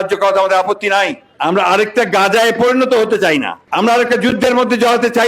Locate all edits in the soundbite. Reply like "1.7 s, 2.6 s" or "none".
1.3 s, 3.6 s